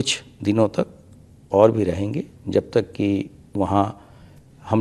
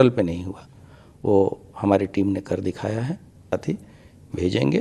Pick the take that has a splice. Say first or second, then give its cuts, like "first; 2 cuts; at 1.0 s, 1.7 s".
second; 1 cut; at 3.5 s